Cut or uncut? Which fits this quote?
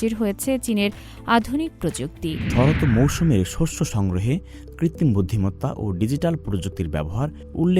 cut